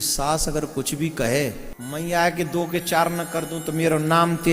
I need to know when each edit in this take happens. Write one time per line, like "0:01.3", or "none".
0:01.7